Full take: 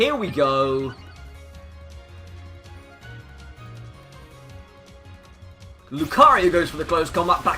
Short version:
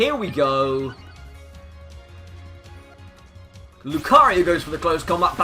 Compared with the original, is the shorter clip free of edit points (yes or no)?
no